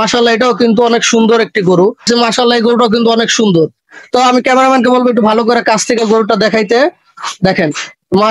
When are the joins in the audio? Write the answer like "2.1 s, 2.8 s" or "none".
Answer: 2.0 s